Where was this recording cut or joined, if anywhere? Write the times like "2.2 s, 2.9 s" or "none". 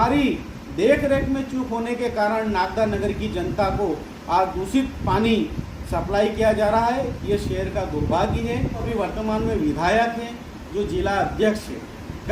8.8 s